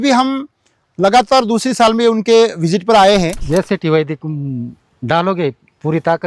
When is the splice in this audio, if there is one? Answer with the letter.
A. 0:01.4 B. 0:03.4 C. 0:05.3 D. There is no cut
B